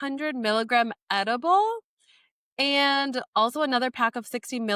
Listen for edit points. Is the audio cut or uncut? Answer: uncut